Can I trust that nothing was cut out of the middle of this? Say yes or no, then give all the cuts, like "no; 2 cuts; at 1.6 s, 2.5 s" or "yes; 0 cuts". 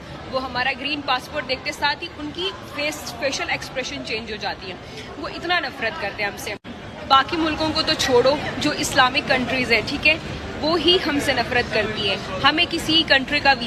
yes; 0 cuts